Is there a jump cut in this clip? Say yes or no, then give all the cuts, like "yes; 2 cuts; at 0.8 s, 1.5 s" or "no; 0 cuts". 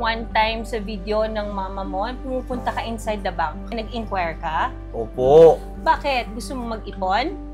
no; 0 cuts